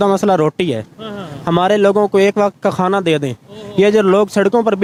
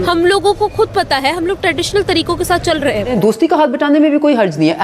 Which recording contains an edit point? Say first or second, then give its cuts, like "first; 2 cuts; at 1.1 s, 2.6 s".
second; 1 cut; at 3.1 s